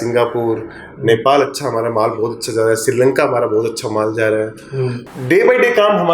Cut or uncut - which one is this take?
cut